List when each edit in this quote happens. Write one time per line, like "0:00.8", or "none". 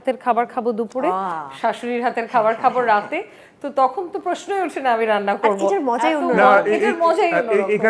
none